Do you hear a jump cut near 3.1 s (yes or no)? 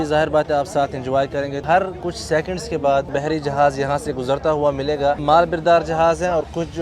yes